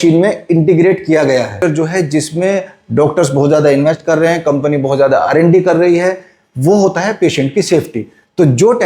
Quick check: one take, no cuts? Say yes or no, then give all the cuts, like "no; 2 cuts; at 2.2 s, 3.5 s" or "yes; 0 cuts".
no; 1 cut; at 1.6 s